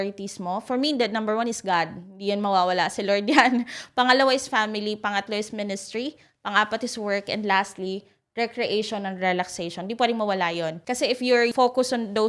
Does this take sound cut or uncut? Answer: uncut